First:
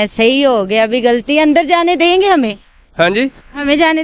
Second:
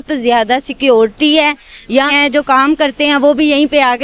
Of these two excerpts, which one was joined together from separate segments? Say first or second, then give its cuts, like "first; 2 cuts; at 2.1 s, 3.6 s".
second; 1 cut; at 2.1 s